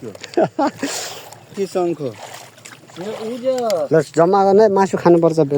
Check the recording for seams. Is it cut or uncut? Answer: cut